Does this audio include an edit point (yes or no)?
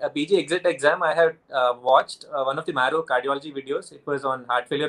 no